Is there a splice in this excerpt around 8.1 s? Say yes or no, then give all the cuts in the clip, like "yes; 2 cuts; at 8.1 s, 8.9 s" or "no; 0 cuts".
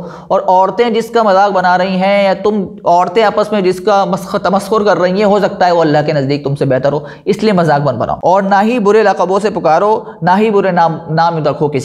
yes; 1 cut; at 8.1 s